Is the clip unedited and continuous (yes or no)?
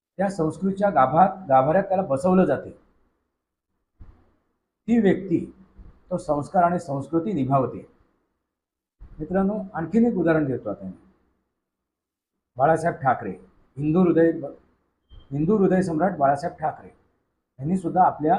yes